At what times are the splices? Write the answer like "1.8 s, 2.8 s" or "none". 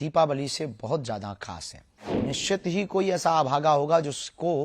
2.1 s